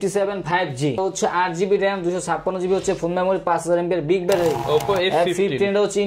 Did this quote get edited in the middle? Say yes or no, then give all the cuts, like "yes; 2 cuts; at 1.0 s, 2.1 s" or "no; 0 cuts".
yes; 2 cuts; at 1.0 s, 4.6 s